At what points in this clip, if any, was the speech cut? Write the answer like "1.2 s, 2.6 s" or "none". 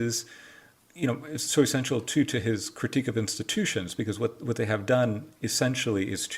none